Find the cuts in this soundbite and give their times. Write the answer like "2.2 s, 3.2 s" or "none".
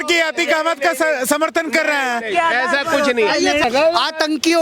3.6 s